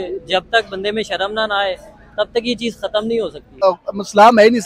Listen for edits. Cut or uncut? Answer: cut